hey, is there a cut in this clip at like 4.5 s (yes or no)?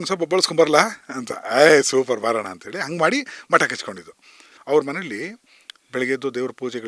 yes